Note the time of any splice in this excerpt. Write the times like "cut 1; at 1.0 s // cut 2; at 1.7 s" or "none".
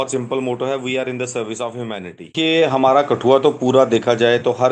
cut 1; at 2.3 s